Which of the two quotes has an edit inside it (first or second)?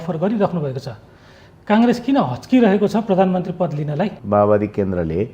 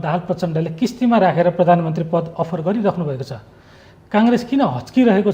first